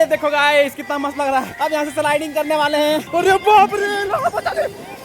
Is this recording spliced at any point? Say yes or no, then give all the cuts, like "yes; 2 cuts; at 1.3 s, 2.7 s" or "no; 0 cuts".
no; 0 cuts